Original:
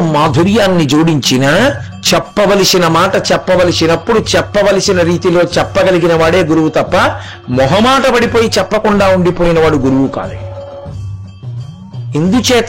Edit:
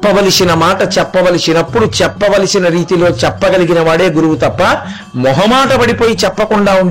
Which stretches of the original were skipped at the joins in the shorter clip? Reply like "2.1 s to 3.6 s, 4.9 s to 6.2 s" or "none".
none